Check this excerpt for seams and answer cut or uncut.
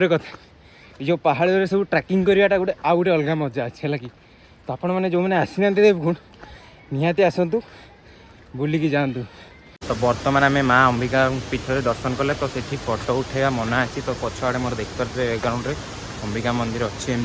cut